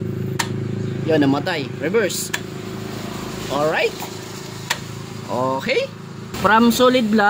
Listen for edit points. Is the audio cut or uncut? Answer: cut